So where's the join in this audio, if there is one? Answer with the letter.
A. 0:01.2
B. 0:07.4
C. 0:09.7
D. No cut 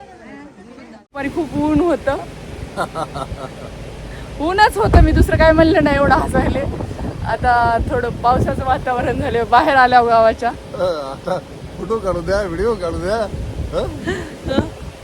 A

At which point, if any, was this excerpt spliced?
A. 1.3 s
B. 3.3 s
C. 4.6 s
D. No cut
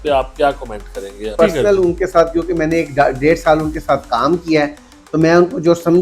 D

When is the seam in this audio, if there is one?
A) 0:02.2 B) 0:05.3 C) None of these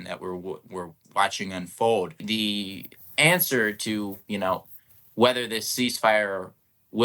A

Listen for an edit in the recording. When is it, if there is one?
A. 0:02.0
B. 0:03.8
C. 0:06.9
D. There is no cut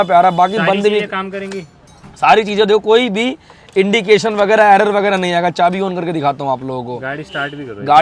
D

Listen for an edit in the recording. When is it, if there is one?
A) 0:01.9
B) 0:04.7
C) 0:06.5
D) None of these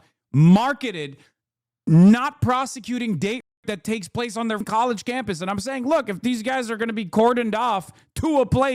B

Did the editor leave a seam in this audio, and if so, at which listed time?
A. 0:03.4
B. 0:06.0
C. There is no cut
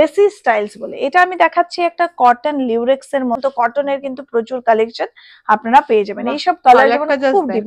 A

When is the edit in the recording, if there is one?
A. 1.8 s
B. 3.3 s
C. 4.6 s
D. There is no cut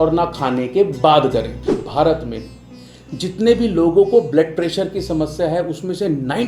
A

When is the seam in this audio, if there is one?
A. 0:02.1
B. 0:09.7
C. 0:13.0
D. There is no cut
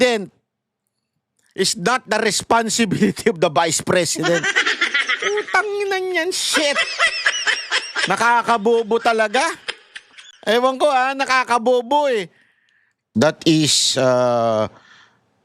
C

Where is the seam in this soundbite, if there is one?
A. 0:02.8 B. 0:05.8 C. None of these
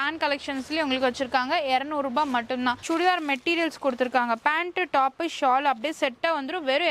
A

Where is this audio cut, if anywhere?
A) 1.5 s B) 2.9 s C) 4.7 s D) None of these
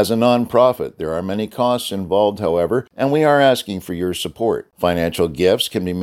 B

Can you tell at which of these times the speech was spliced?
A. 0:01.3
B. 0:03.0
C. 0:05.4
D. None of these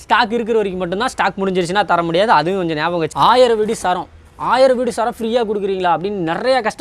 B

